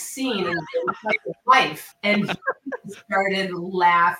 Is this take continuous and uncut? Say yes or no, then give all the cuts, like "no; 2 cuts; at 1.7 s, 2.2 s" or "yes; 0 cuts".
yes; 0 cuts